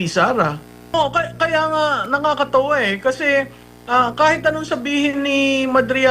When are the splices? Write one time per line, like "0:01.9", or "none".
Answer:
0:00.9